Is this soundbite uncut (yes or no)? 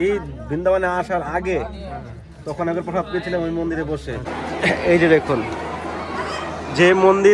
no